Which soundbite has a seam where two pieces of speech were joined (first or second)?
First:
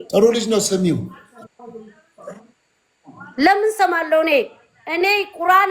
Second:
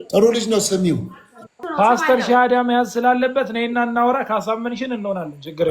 second